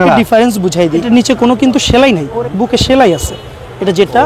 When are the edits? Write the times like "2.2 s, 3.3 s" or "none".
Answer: 1.0 s, 2.3 s